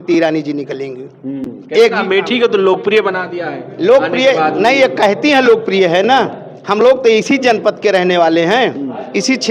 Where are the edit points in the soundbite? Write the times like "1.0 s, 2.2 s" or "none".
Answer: none